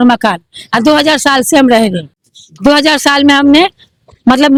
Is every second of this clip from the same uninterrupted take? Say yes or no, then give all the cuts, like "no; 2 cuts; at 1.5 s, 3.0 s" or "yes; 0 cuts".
yes; 0 cuts